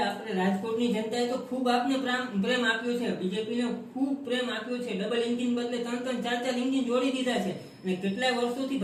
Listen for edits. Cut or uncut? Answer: uncut